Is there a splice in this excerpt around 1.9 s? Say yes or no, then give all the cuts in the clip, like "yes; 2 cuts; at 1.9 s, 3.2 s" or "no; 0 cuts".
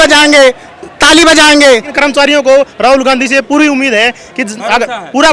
yes; 1 cut; at 1.9 s